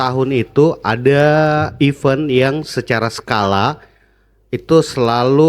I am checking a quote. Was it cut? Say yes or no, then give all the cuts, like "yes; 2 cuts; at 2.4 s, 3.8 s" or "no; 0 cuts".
no; 0 cuts